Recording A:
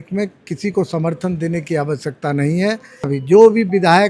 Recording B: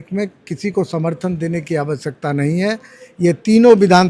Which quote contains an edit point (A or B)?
A